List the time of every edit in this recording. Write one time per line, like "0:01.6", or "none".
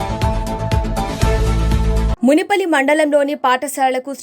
0:02.1